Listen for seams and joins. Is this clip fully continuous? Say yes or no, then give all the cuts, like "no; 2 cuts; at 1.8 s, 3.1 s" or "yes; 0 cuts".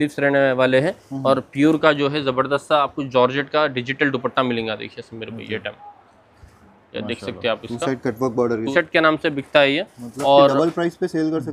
no; 1 cut; at 8.7 s